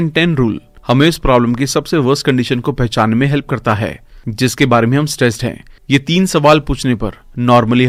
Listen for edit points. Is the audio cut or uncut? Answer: uncut